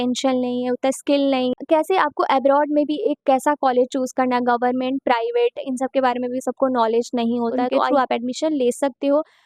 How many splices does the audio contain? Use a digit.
2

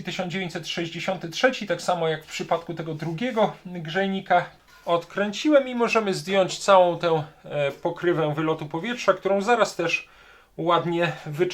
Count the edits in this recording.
1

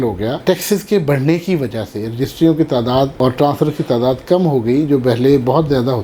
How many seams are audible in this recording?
0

